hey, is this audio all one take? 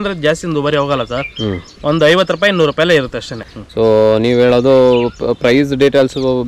yes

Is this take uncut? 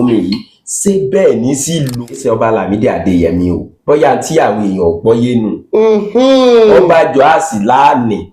no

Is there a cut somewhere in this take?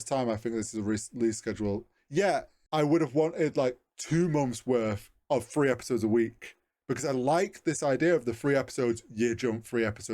yes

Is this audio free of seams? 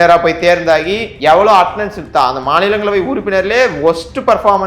no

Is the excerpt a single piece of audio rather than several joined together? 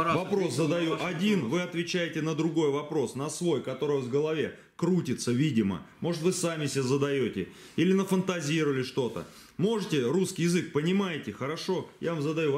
yes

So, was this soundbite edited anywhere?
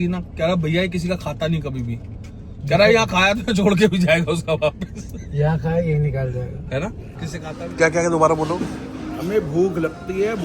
yes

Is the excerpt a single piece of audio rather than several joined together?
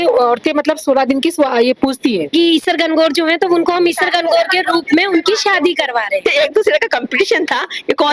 no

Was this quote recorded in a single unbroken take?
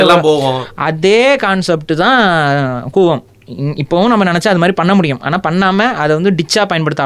yes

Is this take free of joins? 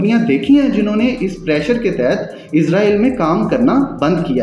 yes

